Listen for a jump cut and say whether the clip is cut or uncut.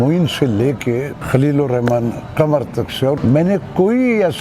cut